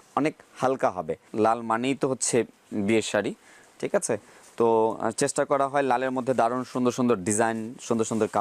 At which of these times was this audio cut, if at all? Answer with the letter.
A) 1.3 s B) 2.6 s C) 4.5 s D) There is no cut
A